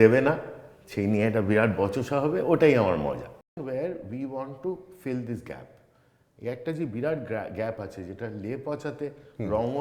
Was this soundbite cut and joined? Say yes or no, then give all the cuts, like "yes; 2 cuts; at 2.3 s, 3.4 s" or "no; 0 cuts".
yes; 1 cut; at 3.6 s